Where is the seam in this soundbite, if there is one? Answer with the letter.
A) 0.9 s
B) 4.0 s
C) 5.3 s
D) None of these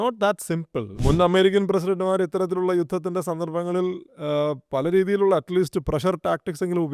A